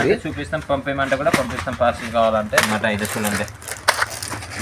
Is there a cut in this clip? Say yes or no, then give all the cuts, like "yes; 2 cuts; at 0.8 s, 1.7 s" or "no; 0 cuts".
yes; 1 cut; at 2.7 s